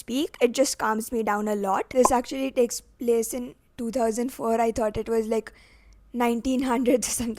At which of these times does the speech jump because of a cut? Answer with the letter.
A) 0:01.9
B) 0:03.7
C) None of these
A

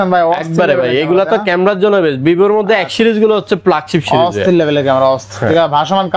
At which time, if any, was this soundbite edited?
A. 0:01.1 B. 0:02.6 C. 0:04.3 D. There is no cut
D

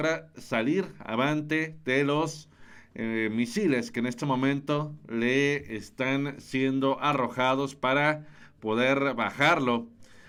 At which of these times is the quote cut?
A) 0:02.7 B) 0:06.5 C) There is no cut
C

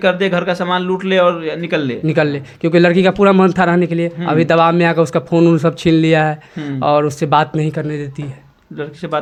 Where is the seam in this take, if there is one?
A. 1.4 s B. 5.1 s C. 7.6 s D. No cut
D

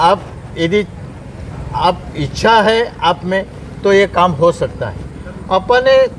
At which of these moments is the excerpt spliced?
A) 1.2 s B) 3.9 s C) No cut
C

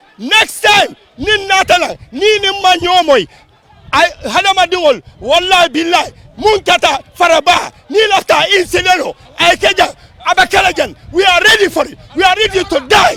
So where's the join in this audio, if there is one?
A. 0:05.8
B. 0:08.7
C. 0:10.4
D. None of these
D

